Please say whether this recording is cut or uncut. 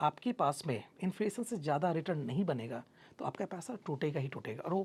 uncut